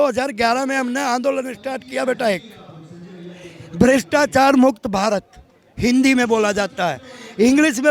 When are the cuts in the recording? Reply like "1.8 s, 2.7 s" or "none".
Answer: none

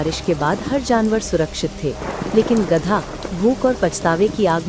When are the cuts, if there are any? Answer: none

